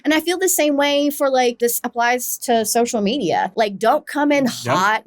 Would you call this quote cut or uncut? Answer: cut